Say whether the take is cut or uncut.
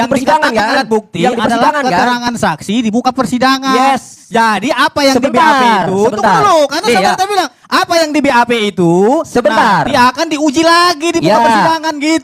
uncut